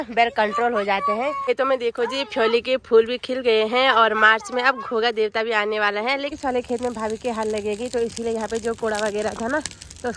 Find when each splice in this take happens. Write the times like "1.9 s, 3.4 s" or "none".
1.4 s, 6.3 s